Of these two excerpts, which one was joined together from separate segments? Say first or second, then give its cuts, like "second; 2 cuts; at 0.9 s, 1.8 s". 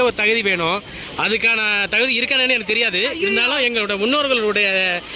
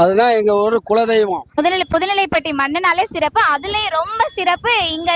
second; 1 cut; at 1.5 s